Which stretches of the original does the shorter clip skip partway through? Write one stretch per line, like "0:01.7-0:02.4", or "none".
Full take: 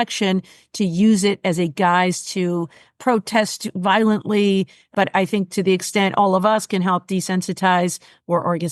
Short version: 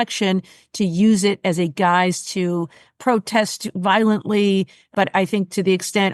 none